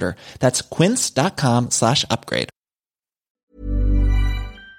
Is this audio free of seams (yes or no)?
no